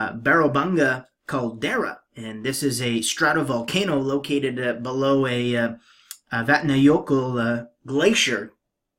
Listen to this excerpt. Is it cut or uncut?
uncut